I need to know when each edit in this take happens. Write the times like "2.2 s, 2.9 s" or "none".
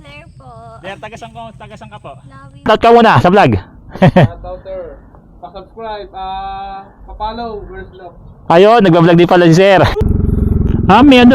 2.7 s, 9.9 s